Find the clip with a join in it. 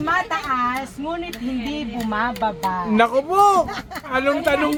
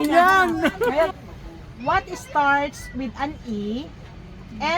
second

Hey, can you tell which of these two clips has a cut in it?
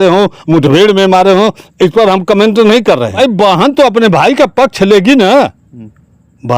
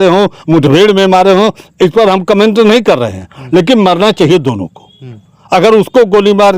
first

